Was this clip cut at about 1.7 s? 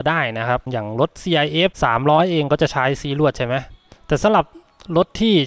no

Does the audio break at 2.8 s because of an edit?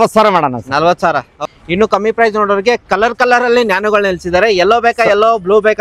no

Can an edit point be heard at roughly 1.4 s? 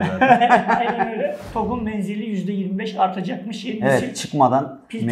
yes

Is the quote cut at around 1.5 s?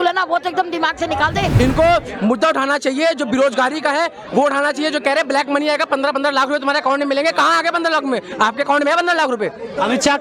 yes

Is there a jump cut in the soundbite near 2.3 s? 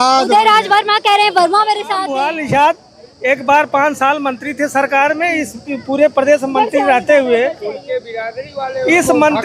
yes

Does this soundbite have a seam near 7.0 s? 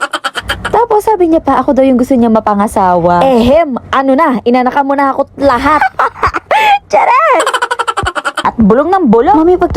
no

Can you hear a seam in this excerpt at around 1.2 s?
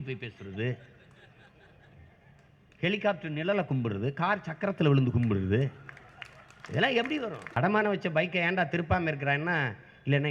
no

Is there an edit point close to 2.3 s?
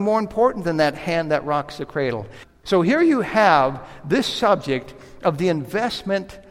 yes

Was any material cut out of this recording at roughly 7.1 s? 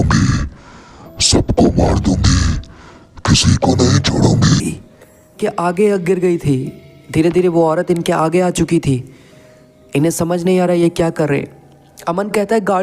no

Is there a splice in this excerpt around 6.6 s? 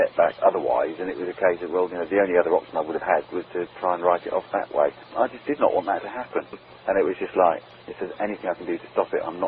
yes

